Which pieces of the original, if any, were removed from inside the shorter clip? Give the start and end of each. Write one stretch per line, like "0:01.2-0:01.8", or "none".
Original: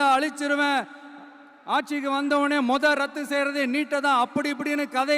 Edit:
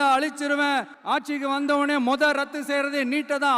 0:00.9-0:01.6